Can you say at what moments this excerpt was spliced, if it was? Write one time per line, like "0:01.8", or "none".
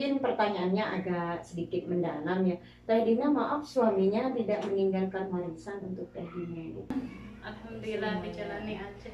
0:06.9